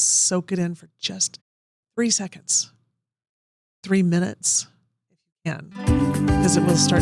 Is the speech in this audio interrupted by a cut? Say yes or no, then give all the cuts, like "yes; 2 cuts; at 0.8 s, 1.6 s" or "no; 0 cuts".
yes; 1 cut; at 5.7 s